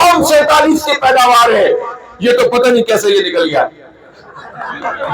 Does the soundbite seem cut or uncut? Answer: uncut